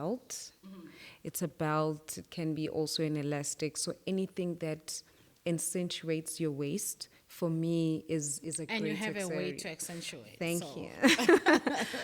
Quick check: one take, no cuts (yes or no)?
yes